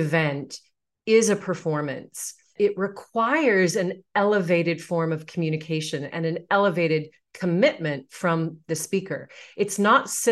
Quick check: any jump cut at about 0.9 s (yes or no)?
no